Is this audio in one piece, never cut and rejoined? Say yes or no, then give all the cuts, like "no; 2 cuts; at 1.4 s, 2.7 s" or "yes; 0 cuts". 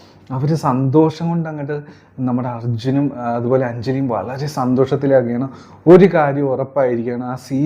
yes; 0 cuts